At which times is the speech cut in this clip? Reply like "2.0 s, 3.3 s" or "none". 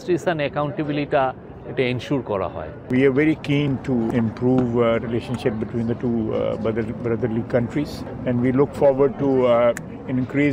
2.9 s, 4.1 s, 8.1 s